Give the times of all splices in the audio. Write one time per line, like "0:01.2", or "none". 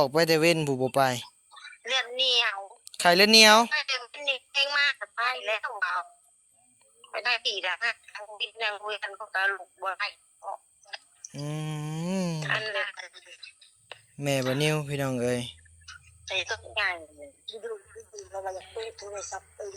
none